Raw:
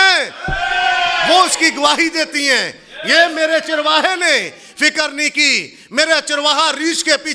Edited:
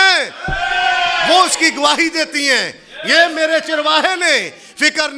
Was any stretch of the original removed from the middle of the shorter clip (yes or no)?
no